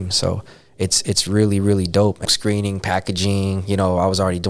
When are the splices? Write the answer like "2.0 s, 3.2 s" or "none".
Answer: 2.3 s